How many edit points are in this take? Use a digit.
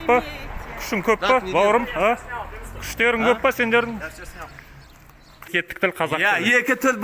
1